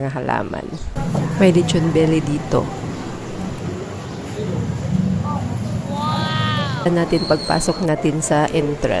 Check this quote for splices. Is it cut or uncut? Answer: cut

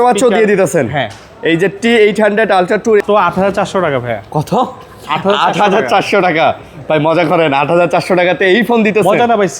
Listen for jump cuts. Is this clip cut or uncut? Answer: cut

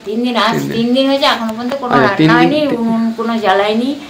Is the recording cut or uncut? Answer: uncut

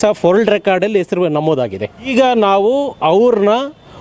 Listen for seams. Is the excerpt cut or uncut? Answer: cut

